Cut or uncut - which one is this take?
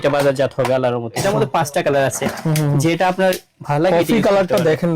cut